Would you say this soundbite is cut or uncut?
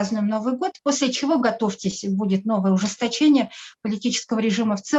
uncut